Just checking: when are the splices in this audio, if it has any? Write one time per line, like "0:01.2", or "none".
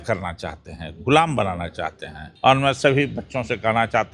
0:02.2

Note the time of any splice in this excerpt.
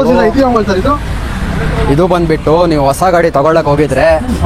none

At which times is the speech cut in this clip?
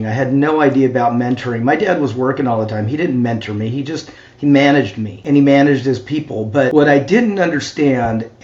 0:05.2
0:06.7

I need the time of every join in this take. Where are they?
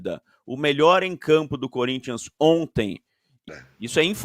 0:03.3

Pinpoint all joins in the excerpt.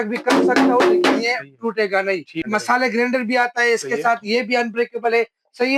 0:02.4

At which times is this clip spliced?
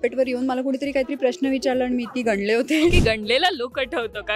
0:03.0

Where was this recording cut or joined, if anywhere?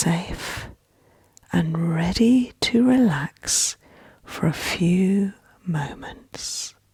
none

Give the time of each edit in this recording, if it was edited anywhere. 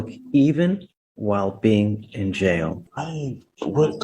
0:02.8

